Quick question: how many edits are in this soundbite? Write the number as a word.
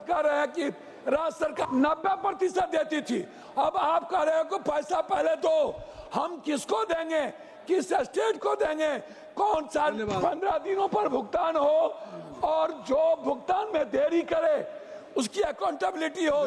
two